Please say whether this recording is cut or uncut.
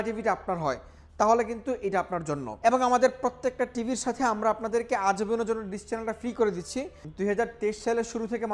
cut